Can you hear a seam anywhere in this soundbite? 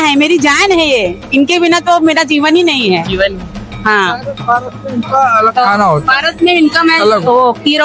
no; 0 cuts

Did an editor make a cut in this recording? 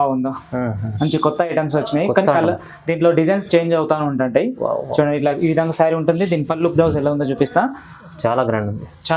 no; 0 cuts

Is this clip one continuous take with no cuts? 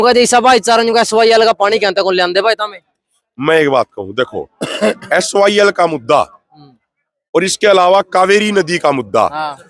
yes; 0 cuts

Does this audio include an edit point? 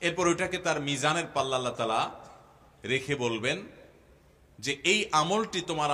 no; 0 cuts

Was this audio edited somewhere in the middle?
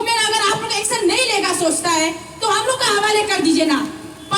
no; 0 cuts

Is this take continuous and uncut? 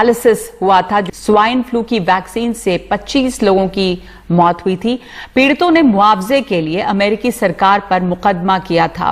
no; 1 cut; at 1.1 s

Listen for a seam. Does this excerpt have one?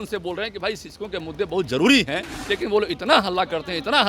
yes; 1 cut; at 2.3 s

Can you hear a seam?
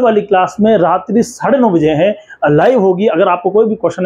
no; 0 cuts

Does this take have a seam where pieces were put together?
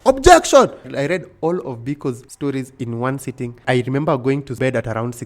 yes; 4 cuts; at 0.9 s, 2.3 s, 3.6 s, 4.6 s

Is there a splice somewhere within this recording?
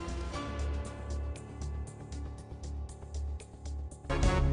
no; 0 cuts

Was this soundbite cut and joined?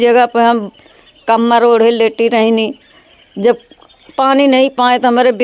no; 0 cuts

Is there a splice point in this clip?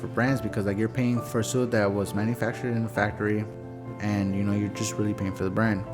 yes; 2 cuts; at 1.2 s, 3.5 s

